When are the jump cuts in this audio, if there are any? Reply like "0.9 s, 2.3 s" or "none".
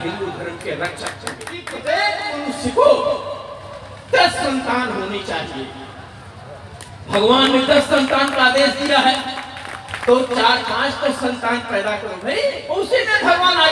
1.7 s, 12.6 s